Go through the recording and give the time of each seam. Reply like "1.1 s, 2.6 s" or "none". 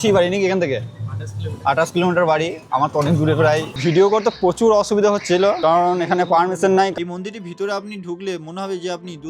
3.8 s, 6.9 s